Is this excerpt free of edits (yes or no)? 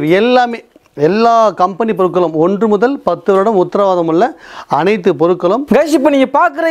no